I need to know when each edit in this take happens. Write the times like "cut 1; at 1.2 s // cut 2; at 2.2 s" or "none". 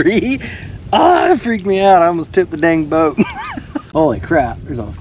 cut 1; at 3.7 s

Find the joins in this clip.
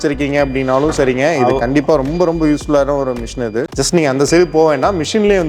cut 1; at 3.7 s

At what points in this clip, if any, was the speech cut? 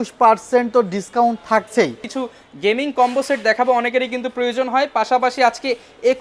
cut 1; at 2.1 s

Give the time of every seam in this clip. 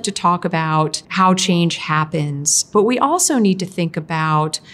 cut 1; at 1.0 s

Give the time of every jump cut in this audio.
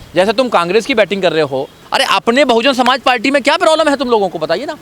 cut 1; at 1.8 s

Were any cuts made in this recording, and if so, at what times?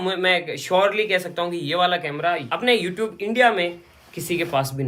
none

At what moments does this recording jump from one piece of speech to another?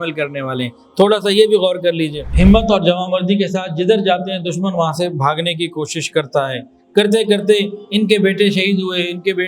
cut 1; at 2.2 s

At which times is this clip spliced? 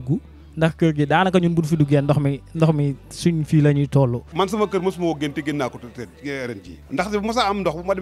cut 1; at 4.2 s // cut 2; at 6.7 s

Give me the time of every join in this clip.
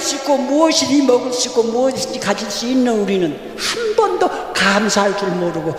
none

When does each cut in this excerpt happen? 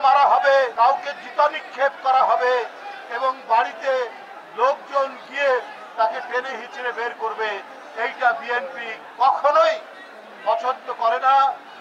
none

